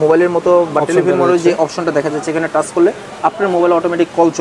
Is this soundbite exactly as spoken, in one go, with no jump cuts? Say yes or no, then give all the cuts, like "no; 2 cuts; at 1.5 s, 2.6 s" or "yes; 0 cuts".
yes; 0 cuts